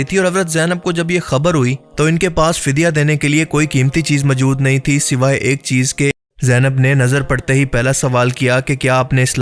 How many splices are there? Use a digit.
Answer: 1